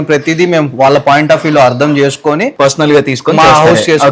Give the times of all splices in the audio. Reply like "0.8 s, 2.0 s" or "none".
2.5 s